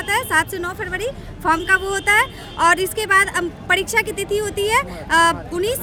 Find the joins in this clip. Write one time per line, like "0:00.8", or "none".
none